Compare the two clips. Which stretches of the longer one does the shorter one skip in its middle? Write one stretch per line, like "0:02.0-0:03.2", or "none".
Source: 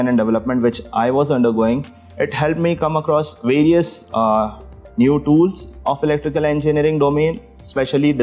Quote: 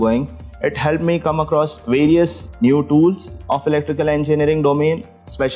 0:04.0-0:04.8